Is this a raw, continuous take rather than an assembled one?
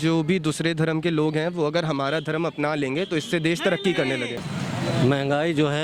no; 1 cut; at 4.4 s

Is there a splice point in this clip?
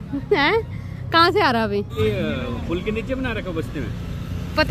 yes; 1 cut; at 1.9 s

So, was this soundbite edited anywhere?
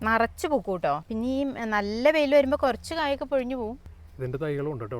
yes; 2 cuts; at 1.0 s, 3.9 s

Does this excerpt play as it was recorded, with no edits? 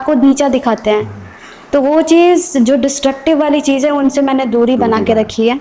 yes; 0 cuts

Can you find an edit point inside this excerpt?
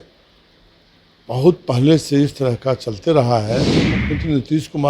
yes; 1 cut; at 4.0 s

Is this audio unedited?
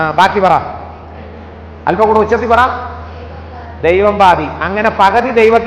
yes; 0 cuts

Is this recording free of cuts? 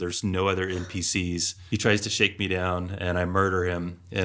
no; 1 cut; at 1.6 s

